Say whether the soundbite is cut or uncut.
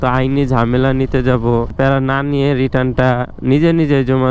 cut